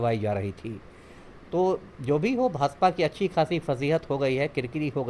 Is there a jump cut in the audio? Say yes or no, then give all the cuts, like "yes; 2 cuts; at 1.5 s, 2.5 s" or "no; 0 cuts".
no; 0 cuts